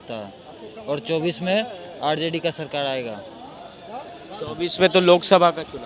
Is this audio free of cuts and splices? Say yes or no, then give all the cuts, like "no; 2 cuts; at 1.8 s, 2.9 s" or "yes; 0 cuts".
yes; 0 cuts